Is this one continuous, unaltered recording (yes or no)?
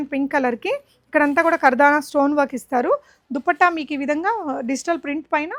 yes